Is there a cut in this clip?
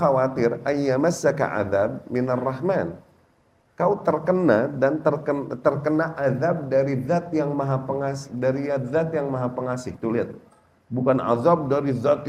no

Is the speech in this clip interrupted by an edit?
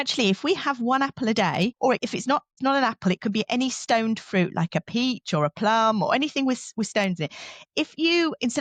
no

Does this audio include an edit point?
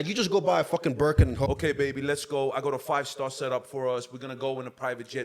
yes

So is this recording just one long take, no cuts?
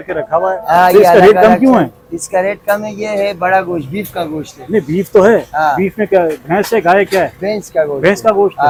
yes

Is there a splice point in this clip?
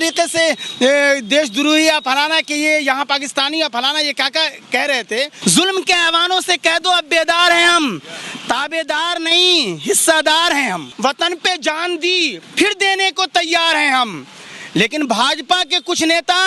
yes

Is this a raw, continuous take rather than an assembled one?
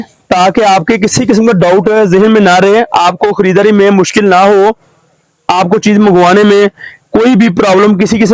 yes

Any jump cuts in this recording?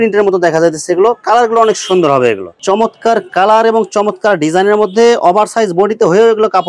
yes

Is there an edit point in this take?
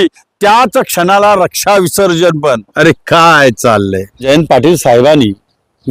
yes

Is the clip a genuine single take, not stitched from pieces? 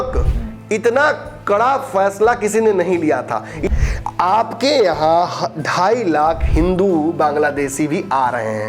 no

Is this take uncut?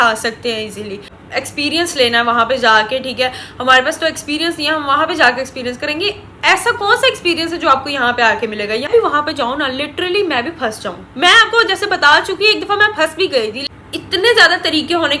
no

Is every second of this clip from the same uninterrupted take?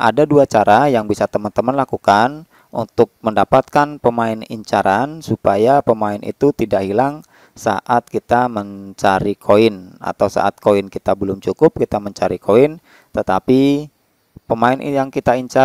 yes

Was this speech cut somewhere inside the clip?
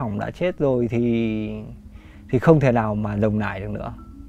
no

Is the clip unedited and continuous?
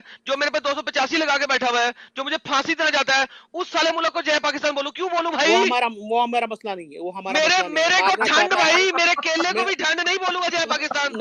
yes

